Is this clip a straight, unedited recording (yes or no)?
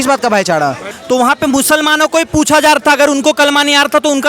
no